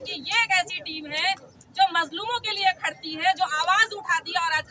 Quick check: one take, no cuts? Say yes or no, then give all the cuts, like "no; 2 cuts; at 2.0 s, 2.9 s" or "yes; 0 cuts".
yes; 0 cuts